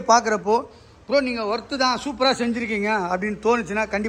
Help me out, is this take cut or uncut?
uncut